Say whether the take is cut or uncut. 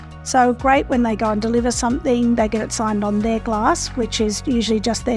uncut